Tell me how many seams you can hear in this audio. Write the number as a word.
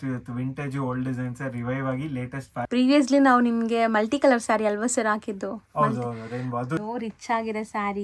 two